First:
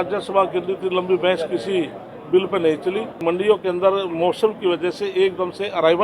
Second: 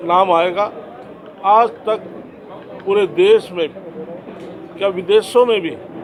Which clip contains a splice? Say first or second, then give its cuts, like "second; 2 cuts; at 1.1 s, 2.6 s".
first; 1 cut; at 3.1 s